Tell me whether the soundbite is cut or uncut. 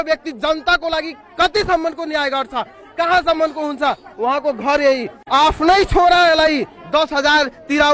uncut